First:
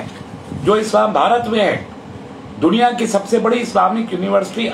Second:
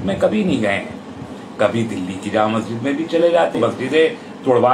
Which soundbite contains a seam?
second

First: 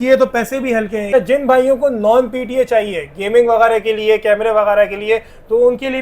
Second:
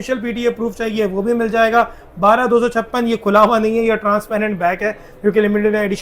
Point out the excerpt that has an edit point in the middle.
first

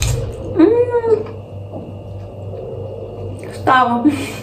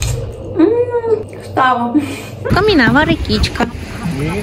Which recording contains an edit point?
second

